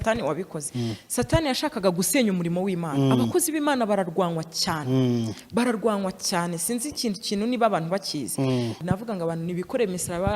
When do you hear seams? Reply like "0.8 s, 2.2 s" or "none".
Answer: 8.8 s